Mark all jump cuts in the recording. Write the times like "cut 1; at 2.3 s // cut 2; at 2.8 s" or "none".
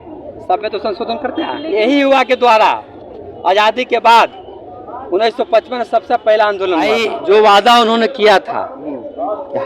cut 1; at 1.6 s // cut 2; at 6.9 s